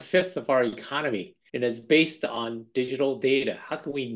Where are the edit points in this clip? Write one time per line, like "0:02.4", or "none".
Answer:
0:01.4